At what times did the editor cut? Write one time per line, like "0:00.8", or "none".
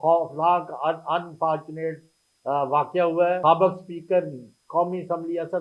0:03.4